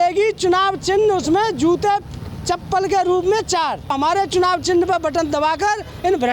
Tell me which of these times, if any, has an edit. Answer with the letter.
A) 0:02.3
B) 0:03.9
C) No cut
B